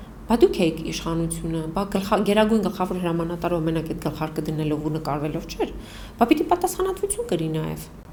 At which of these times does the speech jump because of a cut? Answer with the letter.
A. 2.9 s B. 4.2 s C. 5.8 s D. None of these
D